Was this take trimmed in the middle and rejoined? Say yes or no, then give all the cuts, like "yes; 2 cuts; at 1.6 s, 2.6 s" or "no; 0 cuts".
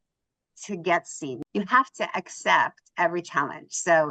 yes; 1 cut; at 1.3 s